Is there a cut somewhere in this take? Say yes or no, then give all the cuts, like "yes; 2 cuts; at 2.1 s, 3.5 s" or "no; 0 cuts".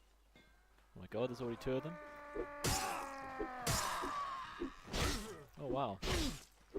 yes; 1 cut; at 4.1 s